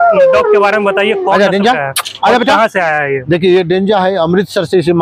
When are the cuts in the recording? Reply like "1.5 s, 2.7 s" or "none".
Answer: none